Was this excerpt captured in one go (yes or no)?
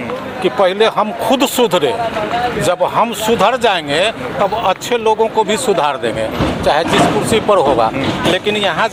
yes